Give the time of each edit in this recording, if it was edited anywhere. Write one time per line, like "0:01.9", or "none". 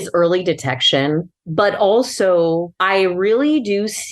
0:01.2
0:02.7